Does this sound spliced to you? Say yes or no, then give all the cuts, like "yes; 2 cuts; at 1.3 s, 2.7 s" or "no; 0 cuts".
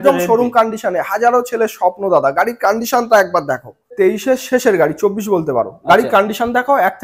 yes; 1 cut; at 3.9 s